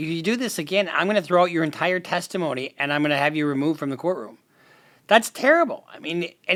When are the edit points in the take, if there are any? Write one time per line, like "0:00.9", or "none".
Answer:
none